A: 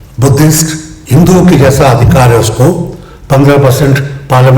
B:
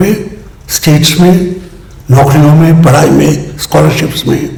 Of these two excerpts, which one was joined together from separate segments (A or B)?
A